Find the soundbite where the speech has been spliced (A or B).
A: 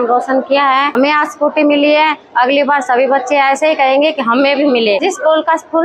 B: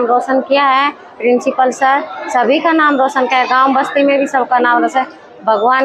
A